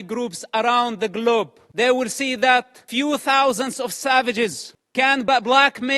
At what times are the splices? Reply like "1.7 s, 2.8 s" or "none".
1.6 s, 2.8 s, 5.3 s